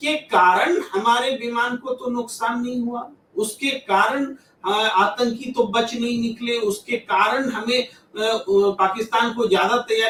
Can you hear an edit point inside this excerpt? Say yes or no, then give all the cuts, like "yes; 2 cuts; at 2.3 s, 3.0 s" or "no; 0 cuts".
no; 0 cuts